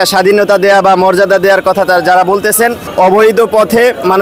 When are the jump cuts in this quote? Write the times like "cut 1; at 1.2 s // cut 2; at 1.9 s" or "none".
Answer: cut 1; at 2.8 s